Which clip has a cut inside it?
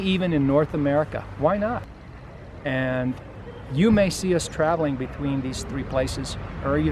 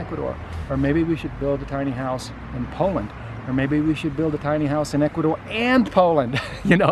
first; 1 cut; at 1.9 s

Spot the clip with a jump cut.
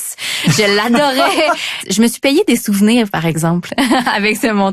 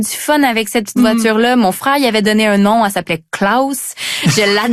first; 1 cut; at 1.9 s

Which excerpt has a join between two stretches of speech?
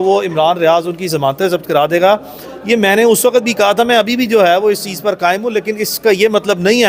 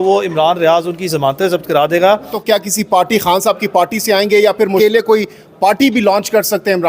second; 2 cuts; at 2.3 s, 5.3 s

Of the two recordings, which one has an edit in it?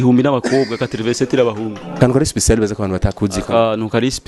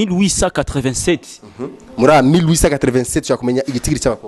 first; 1 cut; at 2.0 s

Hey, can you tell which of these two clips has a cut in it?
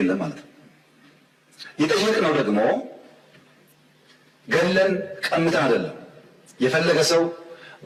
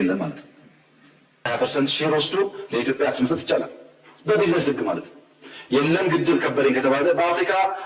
second; 1 cut; at 1.5 s

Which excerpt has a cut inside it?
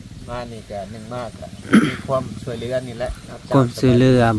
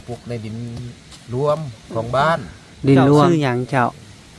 second; 1 cut; at 3.3 s

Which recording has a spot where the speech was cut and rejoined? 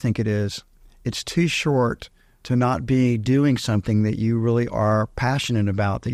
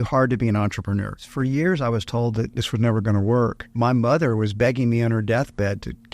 second; 3 cuts; at 1.2 s, 2.5 s, 3.6 s

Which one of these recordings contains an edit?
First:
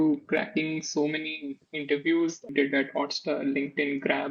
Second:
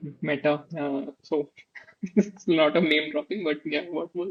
first; 1 cut; at 2.5 s

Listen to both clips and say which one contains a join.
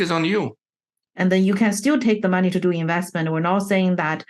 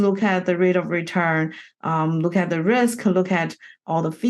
first; 1 cut; at 1.0 s

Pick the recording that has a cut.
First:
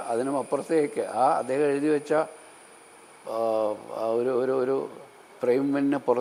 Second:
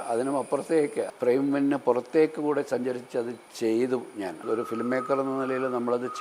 second; 3 cuts; at 1.0 s, 3.5 s, 4.4 s

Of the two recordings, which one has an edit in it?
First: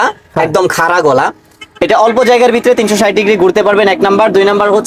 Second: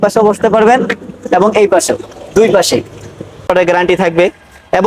second; 1 cut; at 3.5 s

